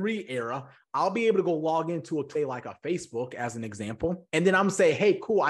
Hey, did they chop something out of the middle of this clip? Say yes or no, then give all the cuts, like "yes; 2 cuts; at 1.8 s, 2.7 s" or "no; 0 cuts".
yes; 1 cut; at 2.3 s